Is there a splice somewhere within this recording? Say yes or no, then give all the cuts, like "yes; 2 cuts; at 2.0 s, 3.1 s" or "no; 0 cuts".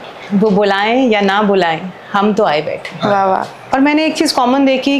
yes; 1 cut; at 3.6 s